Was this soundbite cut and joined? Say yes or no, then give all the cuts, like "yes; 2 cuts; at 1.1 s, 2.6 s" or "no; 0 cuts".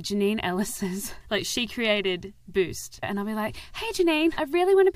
yes; 2 cuts; at 1.1 s, 3.0 s